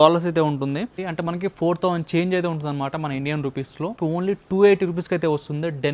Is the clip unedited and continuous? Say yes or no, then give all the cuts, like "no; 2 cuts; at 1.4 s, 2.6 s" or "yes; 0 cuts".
no; 1 cut; at 4.0 s